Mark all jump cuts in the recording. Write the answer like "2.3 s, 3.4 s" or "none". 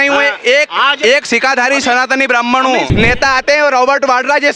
2.9 s